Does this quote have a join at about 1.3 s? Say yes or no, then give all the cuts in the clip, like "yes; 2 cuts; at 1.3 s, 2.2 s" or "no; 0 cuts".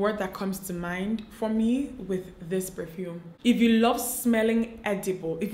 no; 1 cut; at 3.4 s